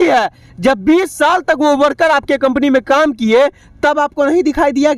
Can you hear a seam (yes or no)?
no